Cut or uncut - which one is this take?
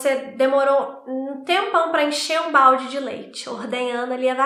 uncut